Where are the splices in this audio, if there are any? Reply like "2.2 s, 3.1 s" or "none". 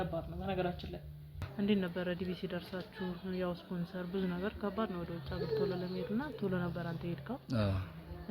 1.4 s